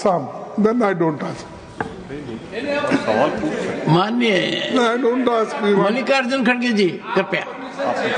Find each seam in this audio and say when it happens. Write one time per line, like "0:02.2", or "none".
none